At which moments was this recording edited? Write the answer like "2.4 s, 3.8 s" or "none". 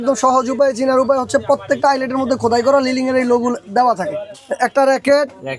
4.2 s